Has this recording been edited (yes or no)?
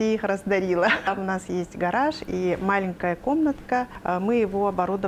yes